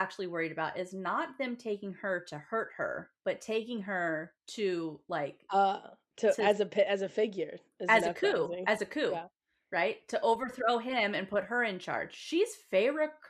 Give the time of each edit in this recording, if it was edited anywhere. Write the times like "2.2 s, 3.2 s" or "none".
3.1 s, 4.4 s